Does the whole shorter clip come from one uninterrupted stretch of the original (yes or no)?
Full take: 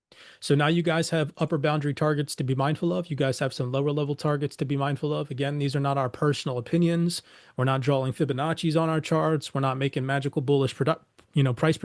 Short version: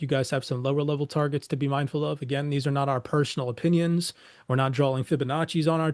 yes